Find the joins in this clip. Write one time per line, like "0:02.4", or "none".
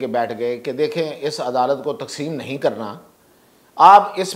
none